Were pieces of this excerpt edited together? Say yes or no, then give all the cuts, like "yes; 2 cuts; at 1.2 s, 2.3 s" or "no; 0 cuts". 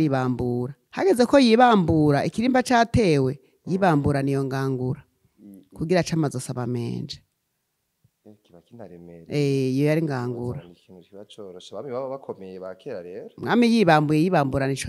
no; 0 cuts